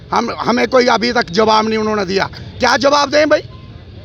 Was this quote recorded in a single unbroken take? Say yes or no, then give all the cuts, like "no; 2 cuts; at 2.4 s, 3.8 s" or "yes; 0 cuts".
yes; 0 cuts